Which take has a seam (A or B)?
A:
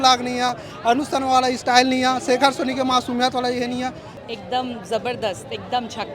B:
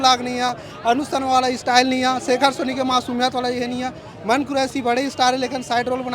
A